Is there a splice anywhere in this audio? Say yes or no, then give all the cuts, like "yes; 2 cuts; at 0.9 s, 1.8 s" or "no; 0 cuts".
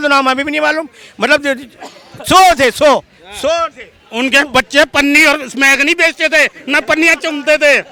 no; 0 cuts